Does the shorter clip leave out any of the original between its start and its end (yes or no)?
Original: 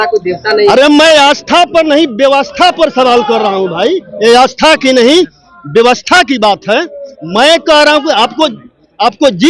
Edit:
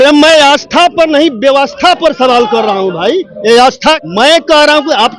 yes